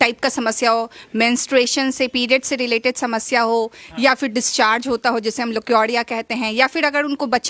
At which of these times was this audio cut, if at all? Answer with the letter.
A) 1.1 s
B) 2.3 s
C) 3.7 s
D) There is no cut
D